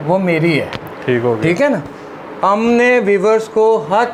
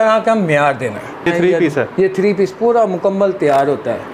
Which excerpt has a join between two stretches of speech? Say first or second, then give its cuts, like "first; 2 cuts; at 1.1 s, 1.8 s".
second; 1 cut; at 1.3 s